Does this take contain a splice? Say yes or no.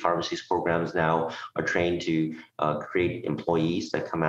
no